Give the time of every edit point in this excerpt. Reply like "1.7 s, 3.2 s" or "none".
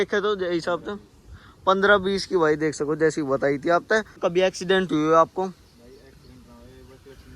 4.1 s